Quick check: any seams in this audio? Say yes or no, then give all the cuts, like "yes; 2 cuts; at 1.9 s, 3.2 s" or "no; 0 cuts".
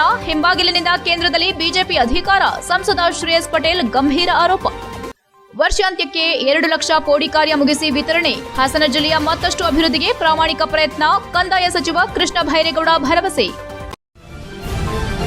yes; 1 cut; at 13.9 s